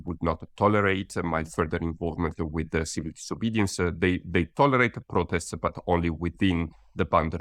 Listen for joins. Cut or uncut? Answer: uncut